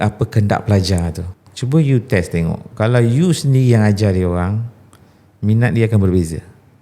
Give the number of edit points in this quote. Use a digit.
1